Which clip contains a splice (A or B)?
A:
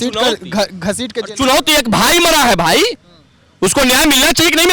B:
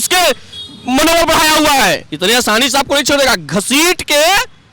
B